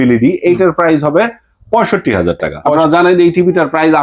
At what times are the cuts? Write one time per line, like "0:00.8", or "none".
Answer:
0:02.6